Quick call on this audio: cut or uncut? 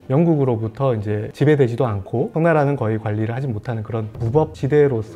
uncut